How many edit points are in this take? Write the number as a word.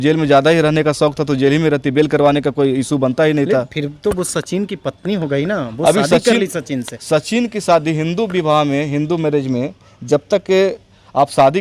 zero